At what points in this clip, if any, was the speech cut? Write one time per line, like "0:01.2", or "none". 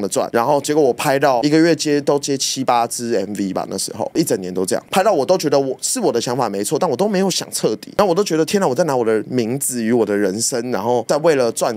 none